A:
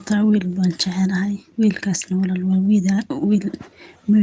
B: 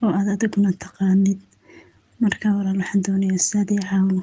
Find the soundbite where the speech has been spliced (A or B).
A